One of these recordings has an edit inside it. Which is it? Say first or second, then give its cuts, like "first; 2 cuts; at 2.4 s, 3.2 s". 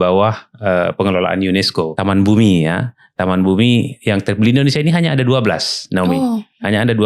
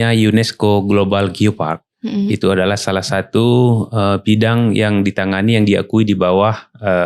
first; 1 cut; at 1.9 s